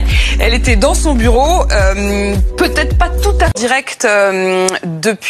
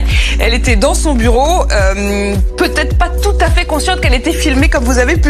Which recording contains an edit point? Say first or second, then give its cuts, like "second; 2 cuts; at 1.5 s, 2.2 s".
first; 1 cut; at 3.5 s